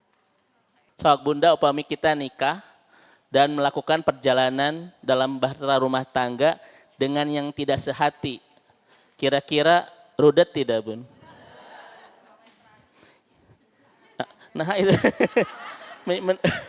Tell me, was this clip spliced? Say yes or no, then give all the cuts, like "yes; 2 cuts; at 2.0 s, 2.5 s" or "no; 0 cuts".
yes; 1 cut; at 0.9 s